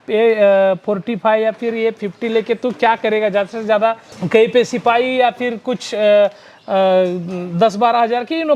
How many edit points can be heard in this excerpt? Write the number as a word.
one